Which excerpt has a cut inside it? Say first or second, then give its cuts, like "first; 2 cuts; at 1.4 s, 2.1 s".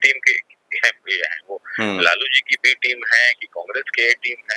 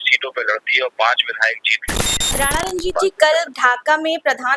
second; 1 cut; at 2.4 s